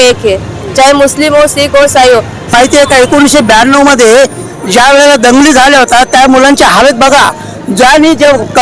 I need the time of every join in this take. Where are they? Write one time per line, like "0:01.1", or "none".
0:02.5